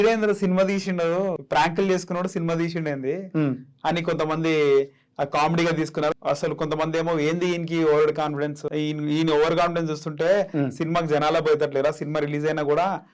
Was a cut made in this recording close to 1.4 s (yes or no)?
yes